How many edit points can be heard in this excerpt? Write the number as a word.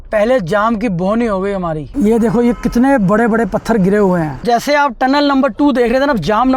two